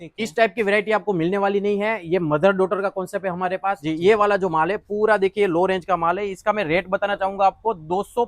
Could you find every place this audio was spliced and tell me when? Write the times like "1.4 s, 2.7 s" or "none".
3.9 s